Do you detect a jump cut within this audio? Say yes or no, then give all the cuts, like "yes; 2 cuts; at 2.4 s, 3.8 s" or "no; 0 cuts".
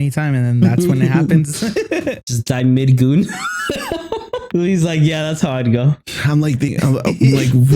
yes; 2 cuts; at 2.2 s, 4.5 s